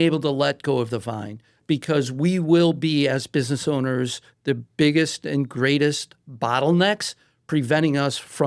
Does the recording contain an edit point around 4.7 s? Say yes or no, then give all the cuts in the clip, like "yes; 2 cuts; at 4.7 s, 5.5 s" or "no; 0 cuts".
no; 0 cuts